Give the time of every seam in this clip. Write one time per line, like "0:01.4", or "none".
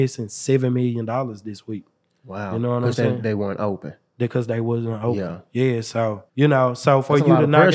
0:06.2